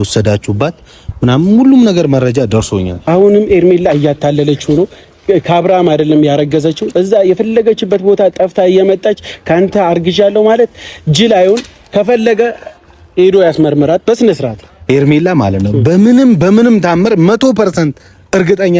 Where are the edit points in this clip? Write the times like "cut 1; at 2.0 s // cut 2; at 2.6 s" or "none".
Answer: cut 1; at 2.9 s // cut 2; at 14.8 s